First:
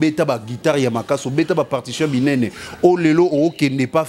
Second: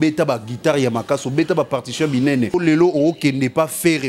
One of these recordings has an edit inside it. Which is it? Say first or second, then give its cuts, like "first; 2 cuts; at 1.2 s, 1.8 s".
second; 1 cut; at 2.5 s